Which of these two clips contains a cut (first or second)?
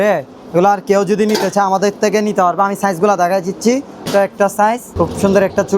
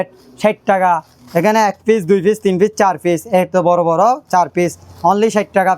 first